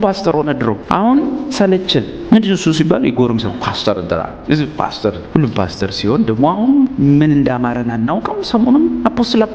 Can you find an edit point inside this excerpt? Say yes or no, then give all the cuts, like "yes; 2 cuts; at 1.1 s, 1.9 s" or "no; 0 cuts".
yes; 4 cuts; at 0.8 s, 2.1 s, 5.2 s, 6.9 s